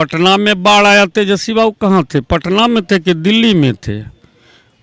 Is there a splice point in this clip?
no; 0 cuts

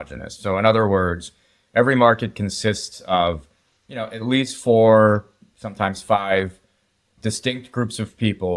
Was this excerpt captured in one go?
yes; 0 cuts

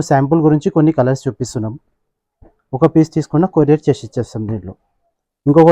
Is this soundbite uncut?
yes; 0 cuts

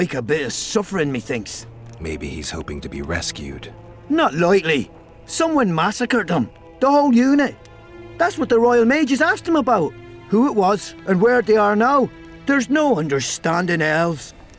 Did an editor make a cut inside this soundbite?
no; 0 cuts

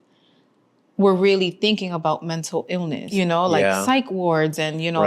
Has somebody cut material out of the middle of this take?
yes; 1 cut; at 3.1 s

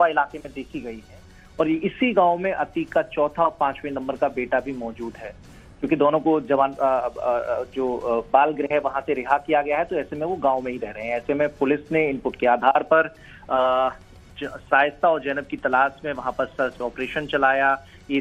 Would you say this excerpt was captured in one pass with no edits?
no; 1 cut; at 6.4 s

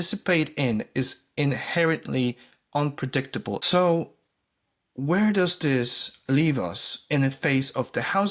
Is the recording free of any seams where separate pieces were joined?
no; 1 cut; at 3.6 s

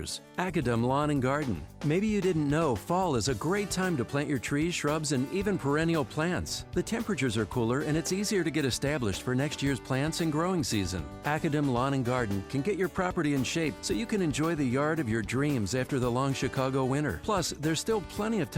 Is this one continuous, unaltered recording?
yes; 0 cuts

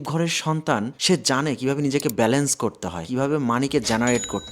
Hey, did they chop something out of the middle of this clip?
yes; 1 cut; at 3.1 s

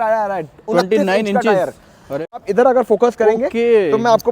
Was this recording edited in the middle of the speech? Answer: yes; 1 cut; at 2.4 s

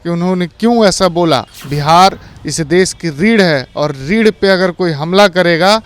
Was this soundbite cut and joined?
yes; 1 cut; at 1.5 s

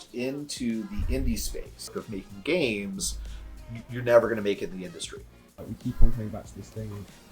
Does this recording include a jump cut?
yes; 2 cuts; at 2.0 s, 5.6 s

